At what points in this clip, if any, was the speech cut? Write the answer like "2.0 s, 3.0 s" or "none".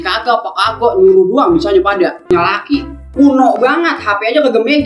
2.3 s